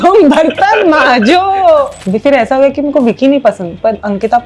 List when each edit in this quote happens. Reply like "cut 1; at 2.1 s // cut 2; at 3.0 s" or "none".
cut 1; at 2.0 s

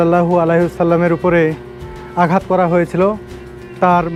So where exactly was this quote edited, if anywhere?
none

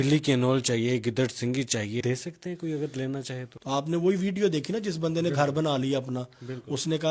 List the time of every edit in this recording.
cut 1; at 2.0 s // cut 2; at 3.5 s

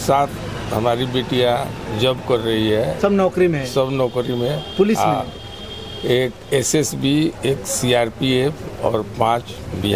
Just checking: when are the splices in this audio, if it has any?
none

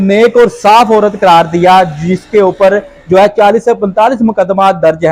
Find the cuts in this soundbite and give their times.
none

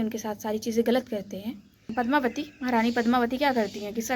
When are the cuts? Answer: cut 1; at 1.9 s

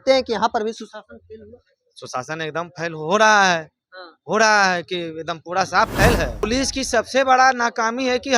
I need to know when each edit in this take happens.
cut 1; at 6.4 s

